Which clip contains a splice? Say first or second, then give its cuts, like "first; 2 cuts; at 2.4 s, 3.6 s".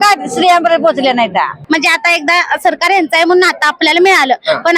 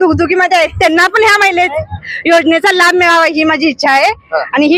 first; 1 cut; at 1.6 s